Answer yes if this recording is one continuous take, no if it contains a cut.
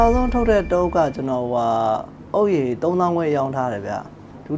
yes